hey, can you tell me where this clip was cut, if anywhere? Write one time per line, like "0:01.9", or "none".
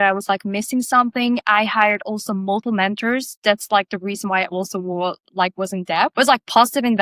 0:02.6
0:06.1